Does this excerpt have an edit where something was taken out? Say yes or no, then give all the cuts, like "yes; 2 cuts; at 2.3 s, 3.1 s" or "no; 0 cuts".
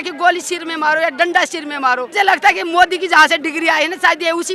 yes; 1 cut; at 2.1 s